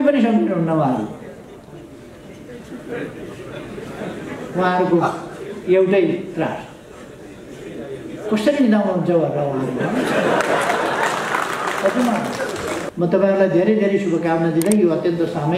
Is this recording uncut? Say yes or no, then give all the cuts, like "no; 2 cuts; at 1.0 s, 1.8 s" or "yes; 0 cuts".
no; 1 cut; at 12.9 s